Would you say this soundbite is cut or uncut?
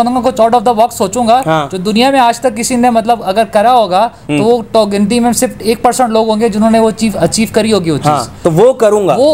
uncut